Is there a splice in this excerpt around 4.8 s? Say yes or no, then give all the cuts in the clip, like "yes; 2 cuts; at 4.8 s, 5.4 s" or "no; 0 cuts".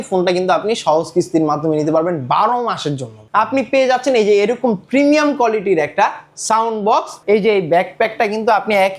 no; 2 cuts; at 3.2 s, 7.1 s